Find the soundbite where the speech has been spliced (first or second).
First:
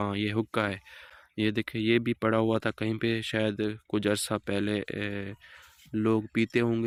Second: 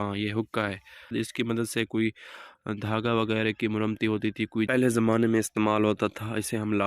second